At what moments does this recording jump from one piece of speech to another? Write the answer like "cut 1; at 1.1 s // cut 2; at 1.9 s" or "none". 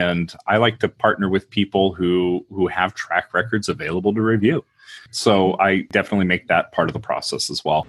none